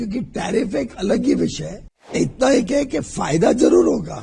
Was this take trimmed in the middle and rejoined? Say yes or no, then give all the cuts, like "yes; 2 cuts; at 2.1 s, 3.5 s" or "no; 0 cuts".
yes; 1 cut; at 2.1 s